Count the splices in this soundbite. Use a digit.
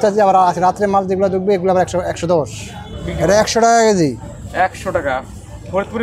1